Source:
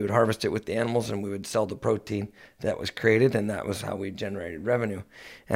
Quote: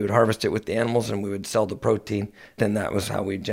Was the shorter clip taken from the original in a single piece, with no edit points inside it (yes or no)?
no